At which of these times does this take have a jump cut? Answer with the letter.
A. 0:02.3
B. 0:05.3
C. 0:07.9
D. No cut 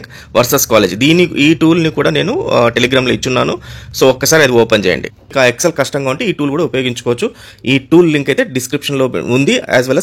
B